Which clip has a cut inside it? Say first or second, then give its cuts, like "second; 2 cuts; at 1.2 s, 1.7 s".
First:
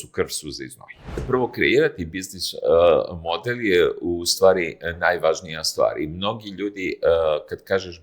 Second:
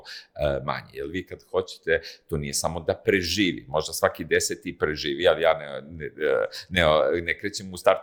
first; 1 cut; at 1.2 s